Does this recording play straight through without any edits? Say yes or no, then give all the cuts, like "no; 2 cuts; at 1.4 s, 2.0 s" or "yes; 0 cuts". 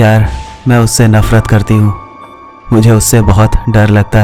yes; 0 cuts